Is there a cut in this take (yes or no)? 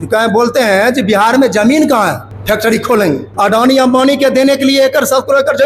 yes